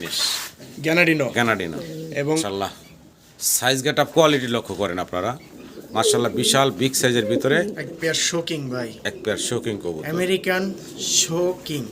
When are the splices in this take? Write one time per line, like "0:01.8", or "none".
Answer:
0:02.4

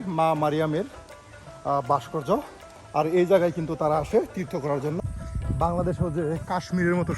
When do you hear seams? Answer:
0:05.0

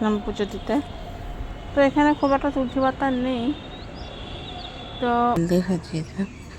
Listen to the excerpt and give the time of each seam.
0:05.4

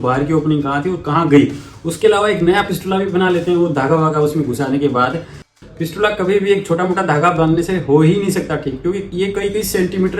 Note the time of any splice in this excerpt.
0:05.5

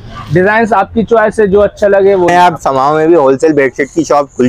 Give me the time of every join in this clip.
0:02.3

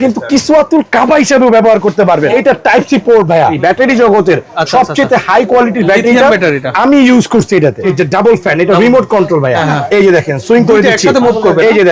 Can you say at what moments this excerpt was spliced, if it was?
0:02.3
0:03.6
0:07.9
0:09.7

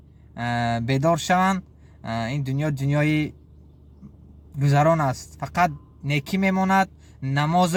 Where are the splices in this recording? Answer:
none

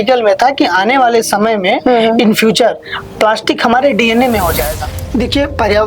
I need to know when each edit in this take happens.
0:05.0

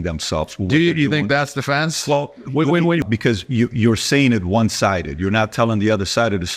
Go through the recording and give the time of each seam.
0:03.0

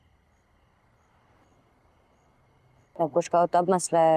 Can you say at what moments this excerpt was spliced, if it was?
0:01.3

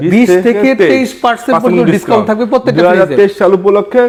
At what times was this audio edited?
none

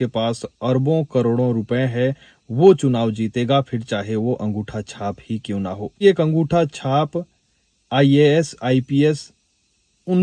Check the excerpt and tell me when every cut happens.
0:06.0

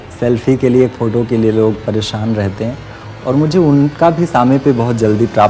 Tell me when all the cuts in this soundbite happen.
none

